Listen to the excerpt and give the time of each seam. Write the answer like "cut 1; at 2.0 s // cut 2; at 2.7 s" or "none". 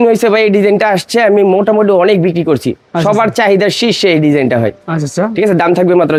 none